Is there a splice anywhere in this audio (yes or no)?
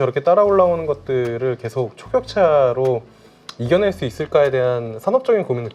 no